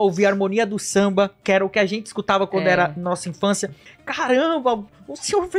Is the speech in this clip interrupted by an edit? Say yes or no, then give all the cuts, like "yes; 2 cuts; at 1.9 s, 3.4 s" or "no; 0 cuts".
yes; 2 cuts; at 1.4 s, 3.9 s